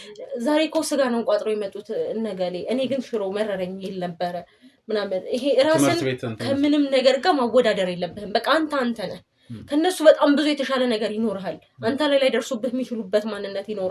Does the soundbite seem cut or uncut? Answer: uncut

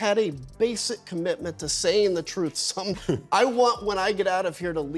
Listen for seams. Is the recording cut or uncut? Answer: cut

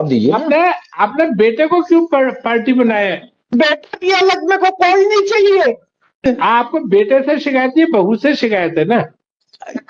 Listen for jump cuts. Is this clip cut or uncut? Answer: cut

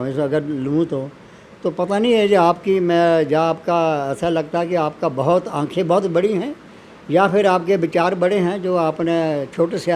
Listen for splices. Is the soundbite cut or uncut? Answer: uncut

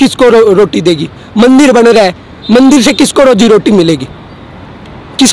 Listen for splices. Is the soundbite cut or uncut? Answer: uncut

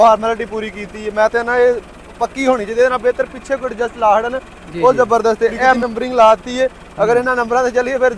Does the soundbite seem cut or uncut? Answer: cut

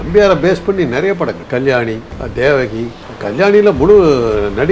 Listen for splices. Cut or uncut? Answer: cut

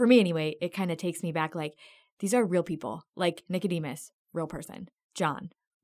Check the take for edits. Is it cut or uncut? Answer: uncut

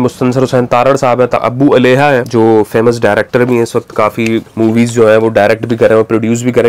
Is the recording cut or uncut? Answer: cut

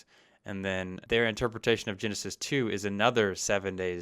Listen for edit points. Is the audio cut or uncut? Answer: cut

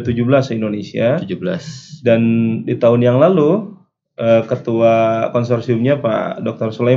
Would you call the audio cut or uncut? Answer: uncut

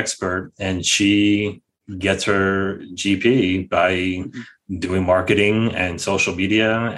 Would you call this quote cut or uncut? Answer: uncut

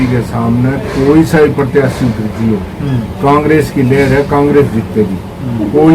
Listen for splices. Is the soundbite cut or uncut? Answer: uncut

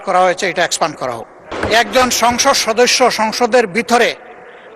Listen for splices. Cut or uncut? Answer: cut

